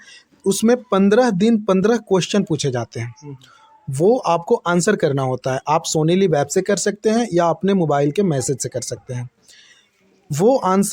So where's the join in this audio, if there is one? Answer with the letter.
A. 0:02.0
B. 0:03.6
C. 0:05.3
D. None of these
D